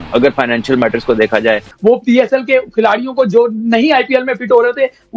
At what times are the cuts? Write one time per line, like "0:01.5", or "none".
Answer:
0:01.7